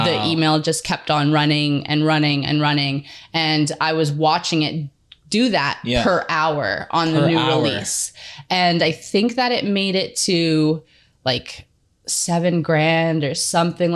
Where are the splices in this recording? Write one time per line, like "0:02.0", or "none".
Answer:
none